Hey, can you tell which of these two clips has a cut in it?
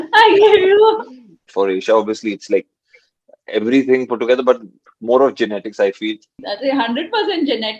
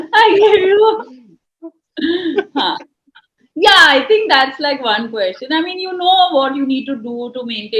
first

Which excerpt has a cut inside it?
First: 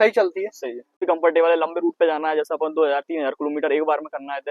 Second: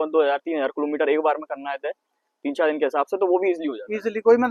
first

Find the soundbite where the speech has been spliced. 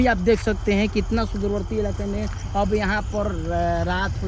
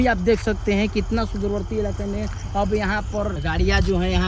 second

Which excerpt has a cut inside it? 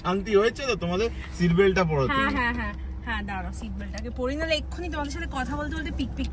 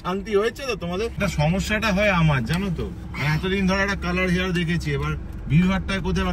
second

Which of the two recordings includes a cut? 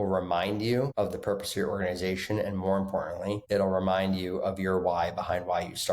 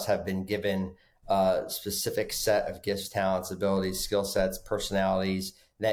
first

